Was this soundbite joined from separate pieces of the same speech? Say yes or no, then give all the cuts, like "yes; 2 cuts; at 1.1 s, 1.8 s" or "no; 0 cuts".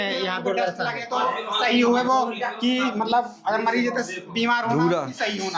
no; 0 cuts